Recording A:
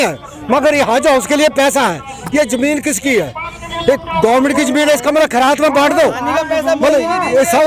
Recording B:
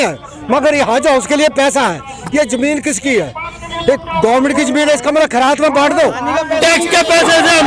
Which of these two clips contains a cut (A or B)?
B